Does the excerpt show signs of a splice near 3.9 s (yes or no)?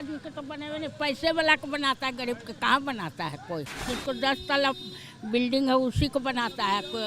yes